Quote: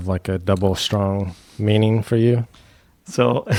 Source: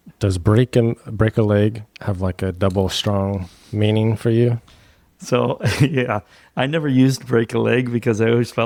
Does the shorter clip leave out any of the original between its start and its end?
no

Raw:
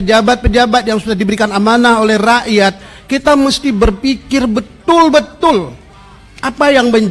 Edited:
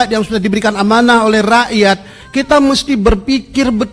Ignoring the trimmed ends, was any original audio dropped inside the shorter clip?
no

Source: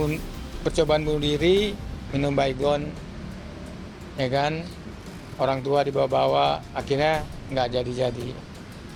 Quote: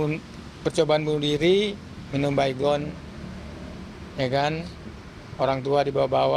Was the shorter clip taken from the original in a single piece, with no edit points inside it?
yes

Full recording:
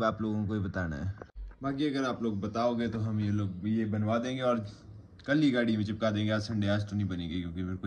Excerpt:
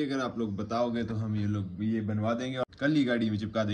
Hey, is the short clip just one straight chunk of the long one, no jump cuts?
no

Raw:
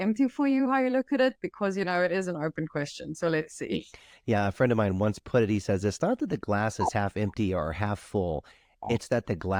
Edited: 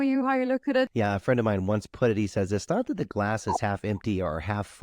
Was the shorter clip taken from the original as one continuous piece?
no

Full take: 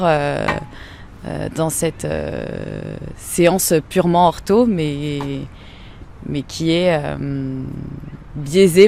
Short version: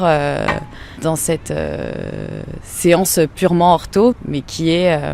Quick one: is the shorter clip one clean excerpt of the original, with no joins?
no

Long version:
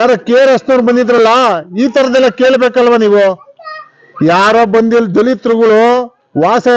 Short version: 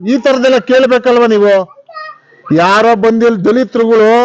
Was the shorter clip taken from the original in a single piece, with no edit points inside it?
yes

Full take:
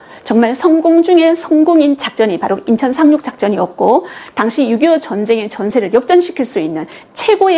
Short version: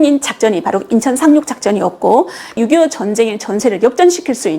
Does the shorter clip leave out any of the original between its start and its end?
yes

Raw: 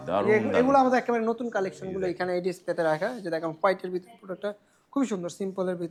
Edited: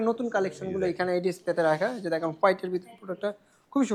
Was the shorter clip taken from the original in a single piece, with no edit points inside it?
yes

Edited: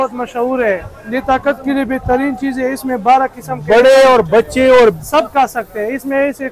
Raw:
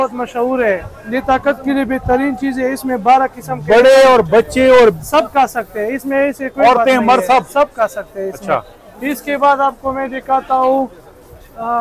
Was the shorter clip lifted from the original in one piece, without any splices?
yes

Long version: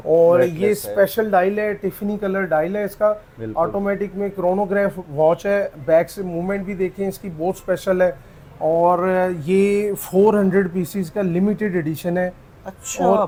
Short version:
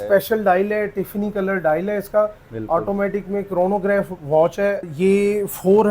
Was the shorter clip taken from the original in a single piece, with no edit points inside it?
no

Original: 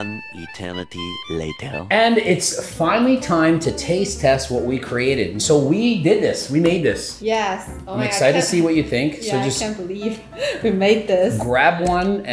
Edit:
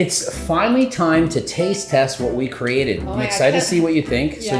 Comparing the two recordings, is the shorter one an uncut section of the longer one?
no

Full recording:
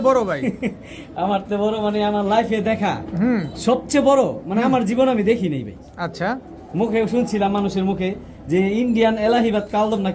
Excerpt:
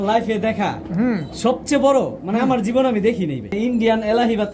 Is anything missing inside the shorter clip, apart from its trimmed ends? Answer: yes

